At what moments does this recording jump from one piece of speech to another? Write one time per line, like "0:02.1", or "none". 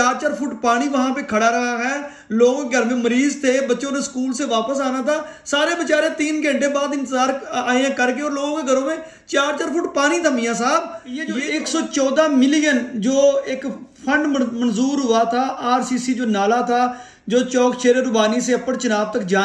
0:11.4